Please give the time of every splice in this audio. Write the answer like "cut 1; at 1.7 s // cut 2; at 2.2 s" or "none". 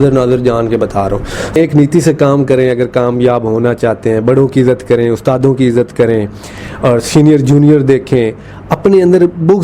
cut 1; at 1.6 s